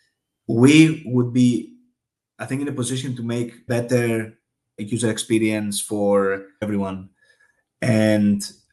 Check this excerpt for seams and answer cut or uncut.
cut